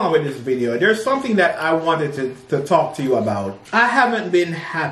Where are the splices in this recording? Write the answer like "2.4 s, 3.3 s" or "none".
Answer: 3.6 s